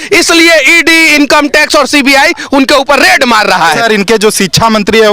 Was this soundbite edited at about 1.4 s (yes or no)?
no